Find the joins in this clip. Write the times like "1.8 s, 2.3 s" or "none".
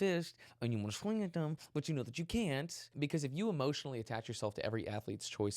2.9 s